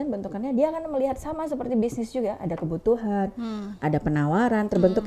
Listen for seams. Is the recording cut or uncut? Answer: uncut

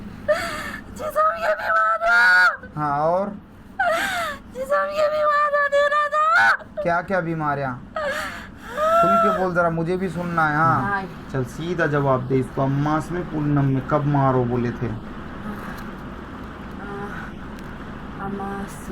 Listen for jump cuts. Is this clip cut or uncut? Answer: cut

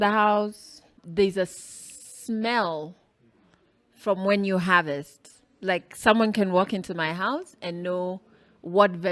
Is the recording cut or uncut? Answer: cut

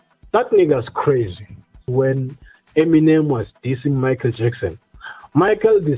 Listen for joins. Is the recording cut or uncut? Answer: cut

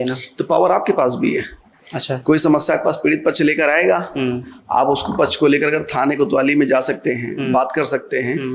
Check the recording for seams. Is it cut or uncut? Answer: uncut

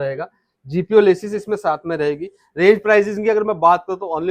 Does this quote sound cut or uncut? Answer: uncut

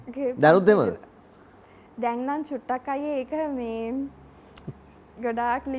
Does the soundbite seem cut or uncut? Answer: uncut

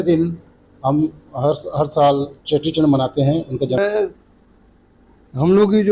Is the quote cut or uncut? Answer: cut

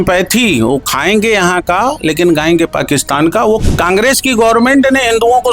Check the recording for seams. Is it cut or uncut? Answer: cut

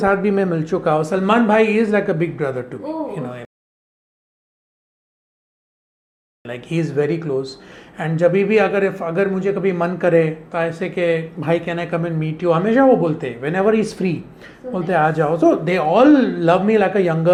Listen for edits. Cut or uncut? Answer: uncut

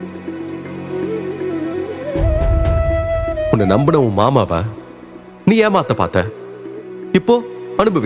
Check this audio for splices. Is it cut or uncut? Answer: uncut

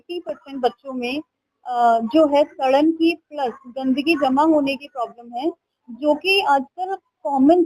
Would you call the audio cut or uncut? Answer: uncut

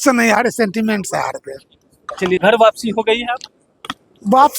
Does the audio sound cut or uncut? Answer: cut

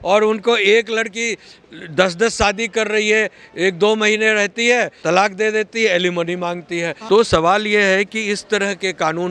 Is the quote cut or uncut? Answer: cut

